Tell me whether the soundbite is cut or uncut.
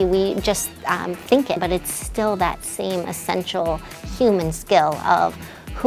cut